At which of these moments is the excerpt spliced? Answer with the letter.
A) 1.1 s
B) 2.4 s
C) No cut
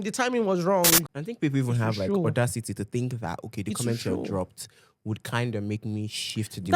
A